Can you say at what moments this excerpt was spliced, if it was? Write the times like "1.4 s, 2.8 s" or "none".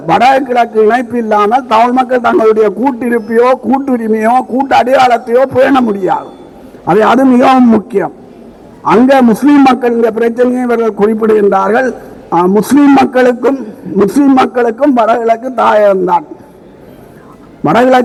none